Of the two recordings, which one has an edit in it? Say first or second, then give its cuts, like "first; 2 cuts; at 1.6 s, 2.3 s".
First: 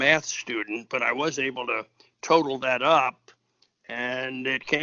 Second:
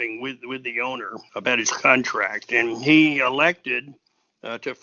second; 1 cut; at 1.2 s